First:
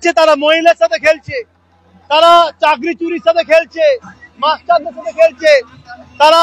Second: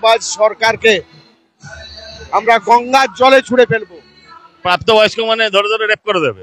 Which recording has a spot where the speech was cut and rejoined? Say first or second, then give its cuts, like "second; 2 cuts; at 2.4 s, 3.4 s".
second; 1 cut; at 4.6 s